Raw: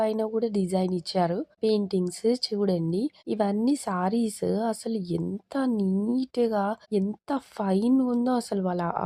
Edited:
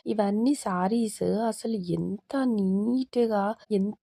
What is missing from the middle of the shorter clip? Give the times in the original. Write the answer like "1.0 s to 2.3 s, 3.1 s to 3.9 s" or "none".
none